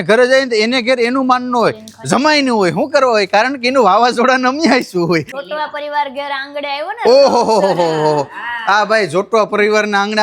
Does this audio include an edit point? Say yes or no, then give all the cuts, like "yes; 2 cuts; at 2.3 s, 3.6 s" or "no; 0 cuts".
yes; 1 cut; at 5.4 s